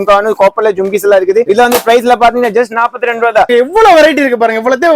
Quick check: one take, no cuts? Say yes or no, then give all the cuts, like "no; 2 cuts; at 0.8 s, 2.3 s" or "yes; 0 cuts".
no; 2 cuts; at 1.4 s, 3.5 s